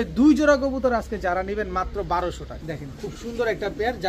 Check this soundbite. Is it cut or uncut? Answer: cut